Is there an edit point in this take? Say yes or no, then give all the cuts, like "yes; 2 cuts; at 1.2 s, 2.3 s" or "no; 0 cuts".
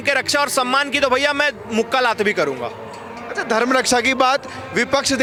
no; 0 cuts